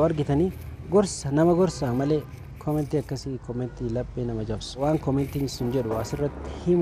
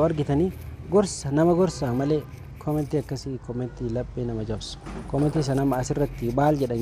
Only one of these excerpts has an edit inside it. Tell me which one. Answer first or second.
first